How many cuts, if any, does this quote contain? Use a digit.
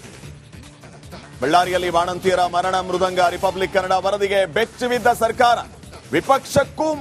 1